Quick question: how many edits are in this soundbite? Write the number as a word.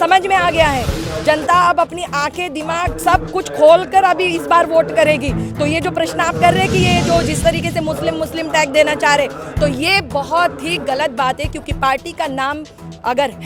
zero